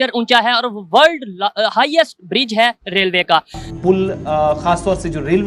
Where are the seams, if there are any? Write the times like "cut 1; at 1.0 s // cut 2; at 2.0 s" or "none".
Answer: cut 1; at 3.6 s